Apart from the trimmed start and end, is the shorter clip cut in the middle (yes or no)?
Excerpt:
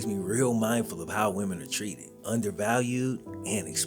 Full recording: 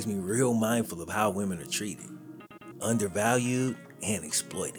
yes